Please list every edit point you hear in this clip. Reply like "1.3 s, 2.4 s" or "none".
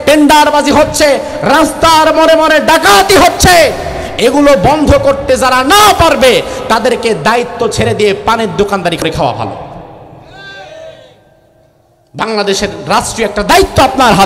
9.0 s